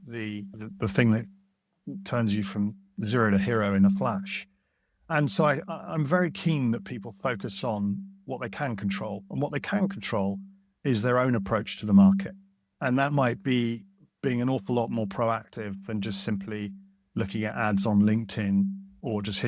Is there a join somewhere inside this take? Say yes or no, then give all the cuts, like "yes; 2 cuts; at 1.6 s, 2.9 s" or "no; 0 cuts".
no; 0 cuts